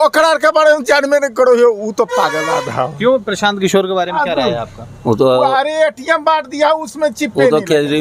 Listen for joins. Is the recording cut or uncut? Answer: uncut